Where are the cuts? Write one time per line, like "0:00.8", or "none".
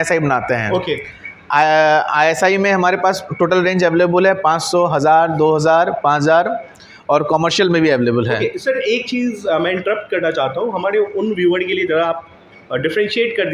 none